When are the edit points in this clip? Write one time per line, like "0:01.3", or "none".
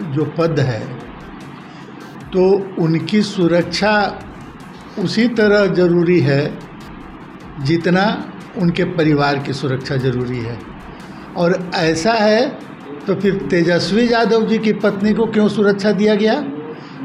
none